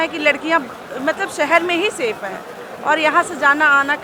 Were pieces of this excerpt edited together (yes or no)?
no